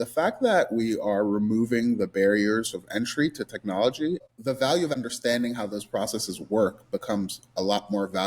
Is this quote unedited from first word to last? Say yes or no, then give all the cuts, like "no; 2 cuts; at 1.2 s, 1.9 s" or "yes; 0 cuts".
no; 2 cuts; at 4.3 s, 4.9 s